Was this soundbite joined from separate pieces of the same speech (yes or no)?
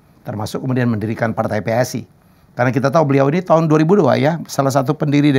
no